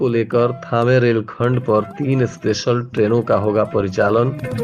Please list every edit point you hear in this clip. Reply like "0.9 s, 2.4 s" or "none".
none